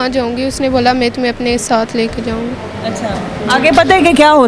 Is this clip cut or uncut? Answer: uncut